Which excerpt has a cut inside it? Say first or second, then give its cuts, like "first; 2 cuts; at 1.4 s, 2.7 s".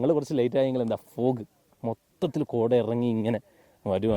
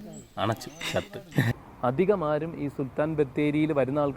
second; 1 cut; at 1.6 s